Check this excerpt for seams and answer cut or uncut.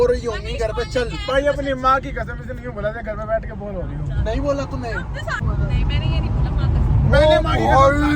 cut